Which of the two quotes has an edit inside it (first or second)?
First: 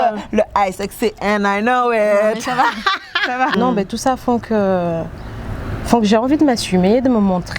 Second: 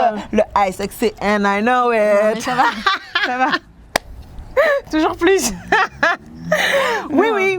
first